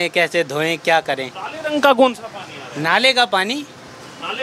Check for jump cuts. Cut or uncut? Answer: uncut